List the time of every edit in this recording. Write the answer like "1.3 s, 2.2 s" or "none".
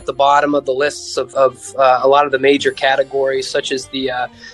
1.3 s